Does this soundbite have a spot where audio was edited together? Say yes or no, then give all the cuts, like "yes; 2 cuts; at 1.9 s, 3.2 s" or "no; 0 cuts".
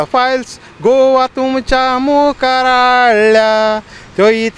no; 0 cuts